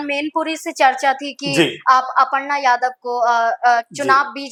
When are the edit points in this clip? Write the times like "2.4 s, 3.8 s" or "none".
none